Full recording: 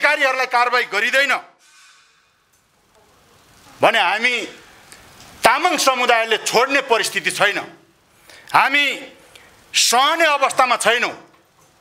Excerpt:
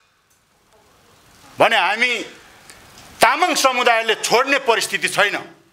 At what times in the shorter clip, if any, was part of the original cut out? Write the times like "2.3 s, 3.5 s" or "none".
none

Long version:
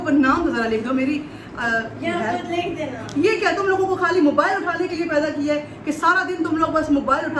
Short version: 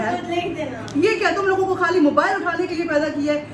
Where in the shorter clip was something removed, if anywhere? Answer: none

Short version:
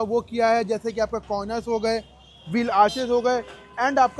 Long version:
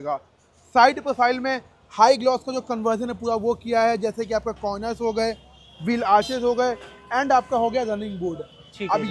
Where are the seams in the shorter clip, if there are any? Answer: none

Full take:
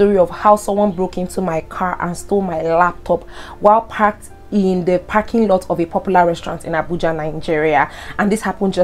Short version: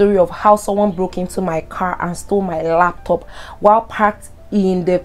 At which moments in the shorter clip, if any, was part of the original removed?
none

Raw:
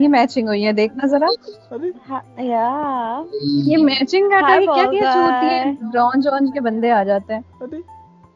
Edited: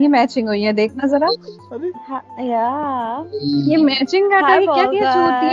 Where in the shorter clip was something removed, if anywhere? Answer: none

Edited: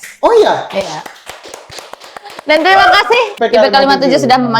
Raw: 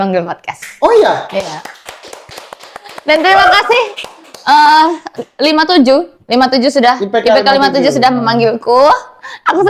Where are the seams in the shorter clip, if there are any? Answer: 3.3 s

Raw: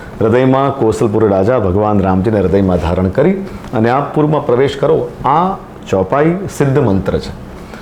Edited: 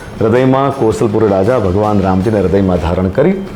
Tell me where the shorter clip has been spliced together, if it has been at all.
none

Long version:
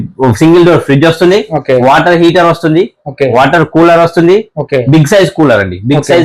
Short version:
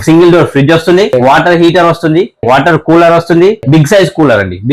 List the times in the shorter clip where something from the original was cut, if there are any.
1.1 s, 2.4 s, 3.6 s

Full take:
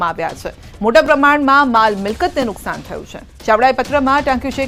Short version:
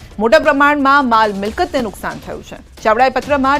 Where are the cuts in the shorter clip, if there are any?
none

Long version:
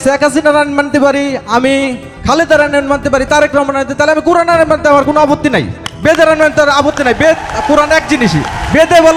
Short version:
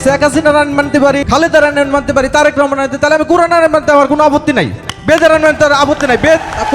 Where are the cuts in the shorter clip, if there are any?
1.2 s

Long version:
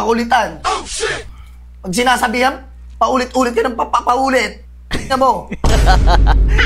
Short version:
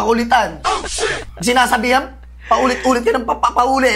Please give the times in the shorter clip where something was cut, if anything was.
1.3 s

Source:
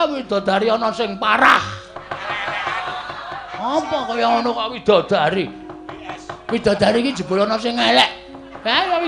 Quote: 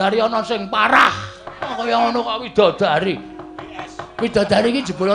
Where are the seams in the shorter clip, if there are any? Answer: 1.7 s

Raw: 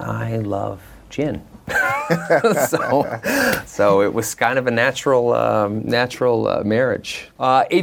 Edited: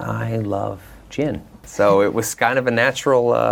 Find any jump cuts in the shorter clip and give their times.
1.6 s

